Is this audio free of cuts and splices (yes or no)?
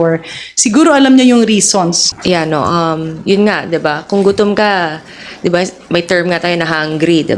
no